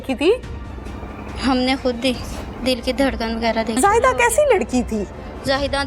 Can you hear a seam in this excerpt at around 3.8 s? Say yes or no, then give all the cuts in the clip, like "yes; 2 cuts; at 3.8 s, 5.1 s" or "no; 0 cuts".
yes; 1 cut; at 3.8 s